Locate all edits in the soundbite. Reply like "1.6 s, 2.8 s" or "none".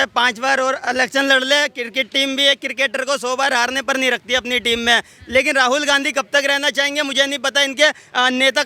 none